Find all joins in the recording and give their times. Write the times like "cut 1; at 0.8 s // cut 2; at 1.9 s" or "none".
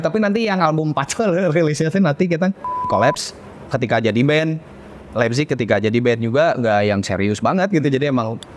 cut 1; at 2.9 s